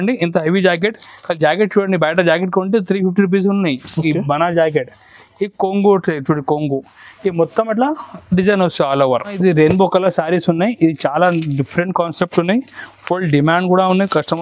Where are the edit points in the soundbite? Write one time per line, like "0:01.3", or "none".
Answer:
0:09.4